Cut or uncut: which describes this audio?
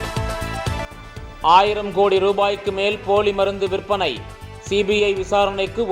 cut